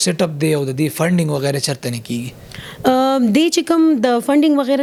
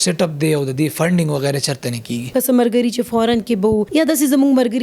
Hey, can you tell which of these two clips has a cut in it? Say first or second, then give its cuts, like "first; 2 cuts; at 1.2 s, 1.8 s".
second; 2 cuts; at 2.3 s, 3.9 s